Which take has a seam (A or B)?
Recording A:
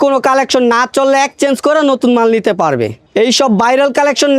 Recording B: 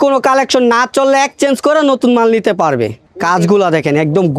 A